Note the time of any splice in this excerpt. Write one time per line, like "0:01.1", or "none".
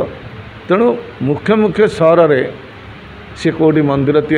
none

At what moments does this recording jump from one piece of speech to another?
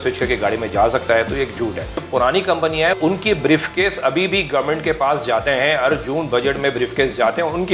0:02.0
0:03.0

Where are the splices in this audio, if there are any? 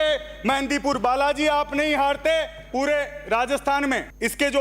0:02.6

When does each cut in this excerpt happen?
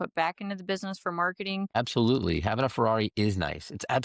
0:01.7

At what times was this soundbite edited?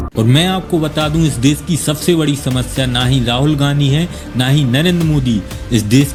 none

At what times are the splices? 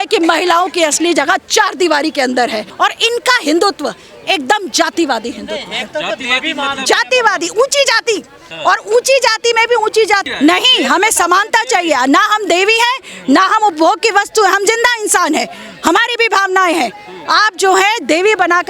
0:02.6
0:10.3

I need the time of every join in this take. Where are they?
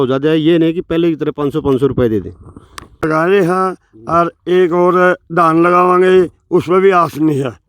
0:03.0

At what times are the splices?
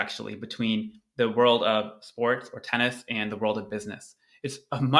none

